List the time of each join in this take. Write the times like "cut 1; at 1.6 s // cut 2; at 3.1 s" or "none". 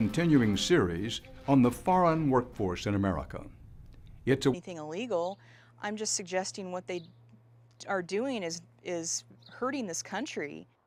none